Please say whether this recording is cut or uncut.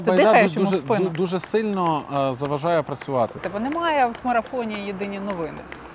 cut